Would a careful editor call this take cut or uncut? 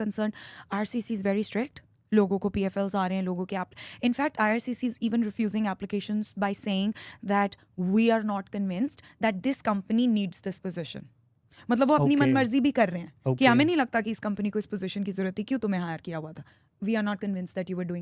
uncut